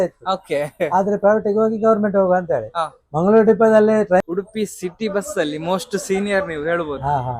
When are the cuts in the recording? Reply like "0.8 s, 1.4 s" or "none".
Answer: 4.2 s